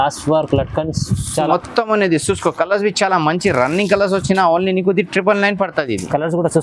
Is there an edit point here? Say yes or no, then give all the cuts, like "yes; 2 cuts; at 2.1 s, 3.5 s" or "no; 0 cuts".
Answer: no; 0 cuts